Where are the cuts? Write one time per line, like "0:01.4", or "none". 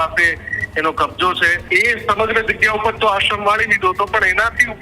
0:01.6